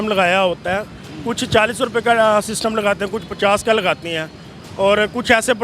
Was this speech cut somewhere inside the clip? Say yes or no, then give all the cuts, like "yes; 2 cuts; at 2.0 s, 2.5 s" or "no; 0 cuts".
no; 0 cuts